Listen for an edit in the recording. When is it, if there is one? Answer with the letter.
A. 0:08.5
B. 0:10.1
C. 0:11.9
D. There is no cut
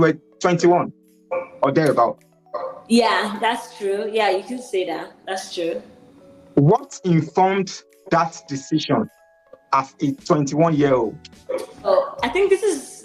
C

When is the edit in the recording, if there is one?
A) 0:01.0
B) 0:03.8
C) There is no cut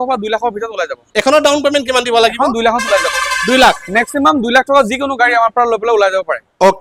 A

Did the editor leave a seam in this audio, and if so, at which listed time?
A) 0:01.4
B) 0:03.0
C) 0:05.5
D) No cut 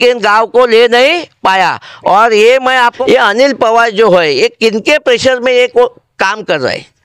B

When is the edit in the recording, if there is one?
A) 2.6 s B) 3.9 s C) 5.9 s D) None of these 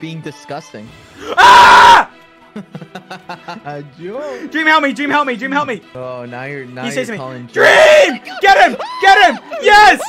C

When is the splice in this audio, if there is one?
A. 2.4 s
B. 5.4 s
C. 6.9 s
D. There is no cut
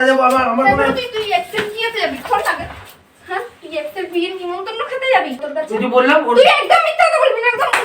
B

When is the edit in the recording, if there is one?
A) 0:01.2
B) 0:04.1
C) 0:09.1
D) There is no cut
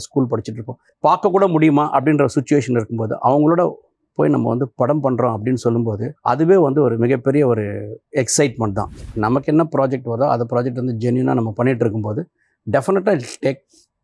C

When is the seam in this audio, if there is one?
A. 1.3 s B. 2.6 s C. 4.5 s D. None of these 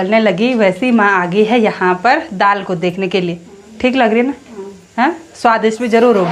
D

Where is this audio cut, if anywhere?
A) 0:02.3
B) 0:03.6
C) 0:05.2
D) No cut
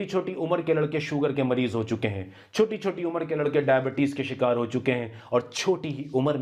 D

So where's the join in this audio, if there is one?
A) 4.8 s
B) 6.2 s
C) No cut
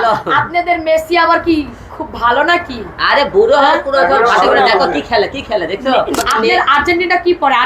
B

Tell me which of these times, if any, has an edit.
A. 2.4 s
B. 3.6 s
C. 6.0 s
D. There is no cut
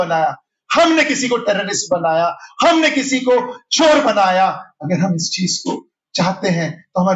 D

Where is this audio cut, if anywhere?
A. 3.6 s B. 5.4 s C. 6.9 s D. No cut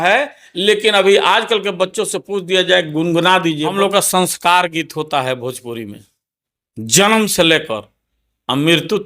A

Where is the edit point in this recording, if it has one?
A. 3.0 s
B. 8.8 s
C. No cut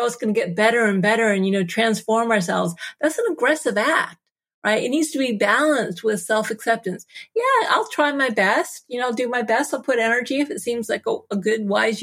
C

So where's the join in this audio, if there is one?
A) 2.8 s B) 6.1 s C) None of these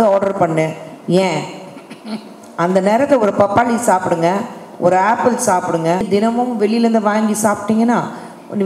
B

